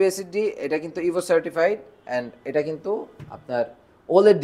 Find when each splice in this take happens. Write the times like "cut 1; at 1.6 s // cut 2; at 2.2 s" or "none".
none

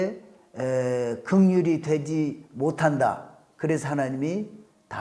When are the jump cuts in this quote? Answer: none

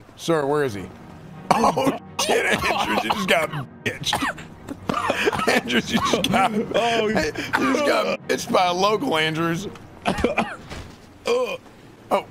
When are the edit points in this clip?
none

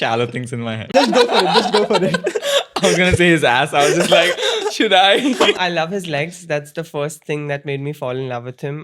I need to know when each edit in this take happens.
cut 1; at 0.9 s // cut 2; at 5.6 s

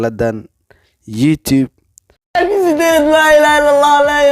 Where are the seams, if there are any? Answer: cut 1; at 2.2 s

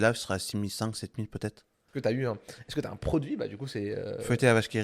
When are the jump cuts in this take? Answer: cut 1; at 1.9 s

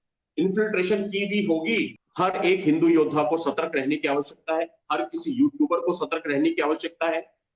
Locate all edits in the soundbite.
cut 1; at 2.0 s

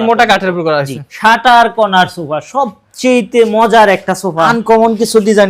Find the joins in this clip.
cut 1; at 1.1 s // cut 2; at 4.5 s

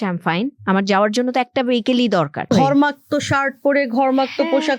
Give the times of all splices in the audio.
cut 1; at 2.5 s

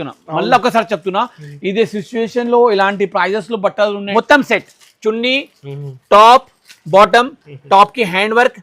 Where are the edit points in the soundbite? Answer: cut 1; at 4.0 s

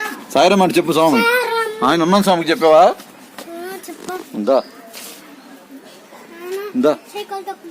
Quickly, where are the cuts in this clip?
cut 1; at 6.1 s

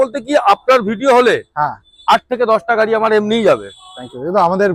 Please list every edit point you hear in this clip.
none

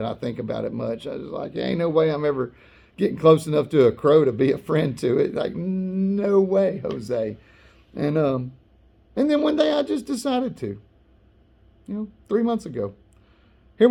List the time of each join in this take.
none

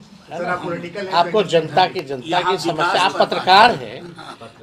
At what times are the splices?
none

